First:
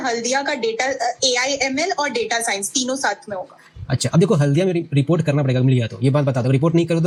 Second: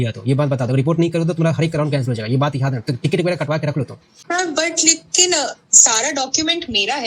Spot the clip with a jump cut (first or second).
second